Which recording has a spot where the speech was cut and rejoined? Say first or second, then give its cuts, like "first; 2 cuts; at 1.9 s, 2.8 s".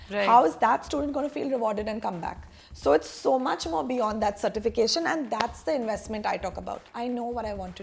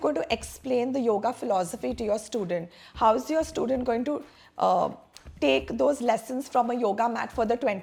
first; 1 cut; at 6.8 s